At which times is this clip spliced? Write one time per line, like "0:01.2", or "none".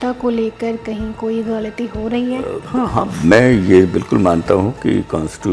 0:02.6